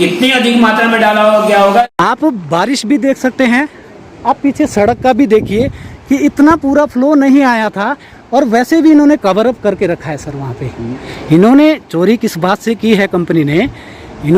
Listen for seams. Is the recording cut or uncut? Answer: cut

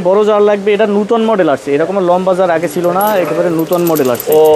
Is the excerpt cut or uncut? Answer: uncut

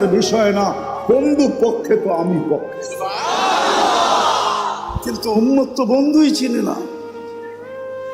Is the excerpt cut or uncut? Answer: cut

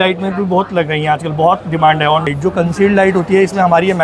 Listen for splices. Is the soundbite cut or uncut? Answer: cut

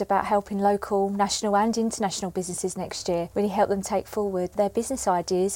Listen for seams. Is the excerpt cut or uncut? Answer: cut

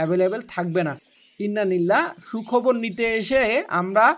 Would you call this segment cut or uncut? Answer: cut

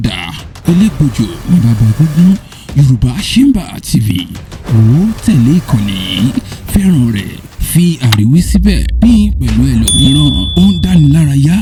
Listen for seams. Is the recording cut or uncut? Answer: uncut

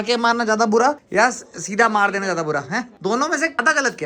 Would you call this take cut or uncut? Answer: uncut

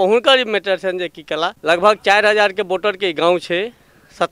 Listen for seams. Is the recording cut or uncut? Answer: cut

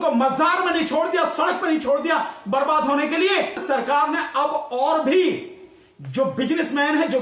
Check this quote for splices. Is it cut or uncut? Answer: cut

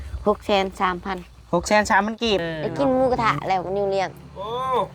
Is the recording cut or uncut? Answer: cut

